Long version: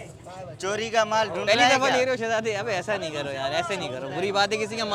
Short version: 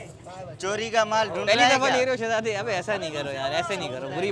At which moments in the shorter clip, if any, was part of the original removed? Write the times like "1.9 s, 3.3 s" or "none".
none